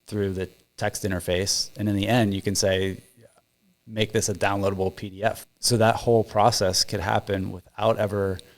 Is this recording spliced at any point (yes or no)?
yes